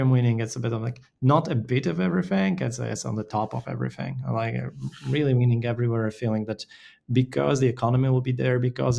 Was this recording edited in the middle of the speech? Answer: no; 0 cuts

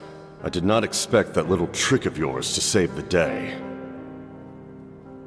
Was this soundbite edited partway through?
no; 0 cuts

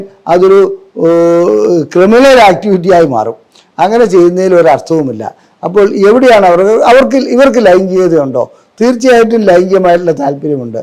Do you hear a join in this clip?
no; 0 cuts

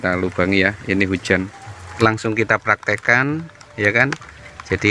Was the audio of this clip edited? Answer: yes; 1 cut; at 1.8 s

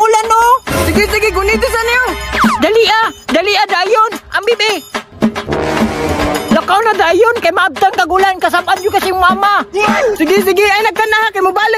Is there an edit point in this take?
no; 0 cuts

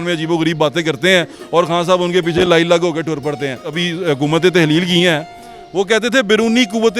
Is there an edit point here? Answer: no; 0 cuts

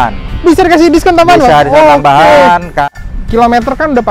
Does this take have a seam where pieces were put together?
yes; 1 cut; at 2.9 s

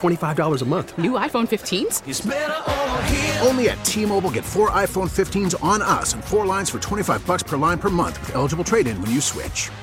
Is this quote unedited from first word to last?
yes; 0 cuts

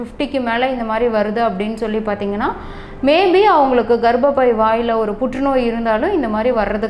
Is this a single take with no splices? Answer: yes; 0 cuts

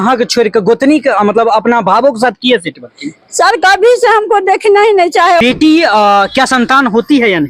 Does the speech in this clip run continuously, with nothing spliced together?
no; 1 cut; at 5.4 s

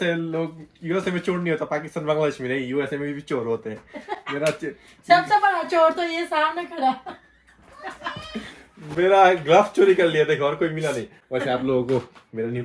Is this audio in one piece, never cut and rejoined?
yes; 0 cuts

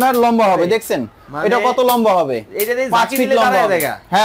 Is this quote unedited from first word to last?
yes; 0 cuts

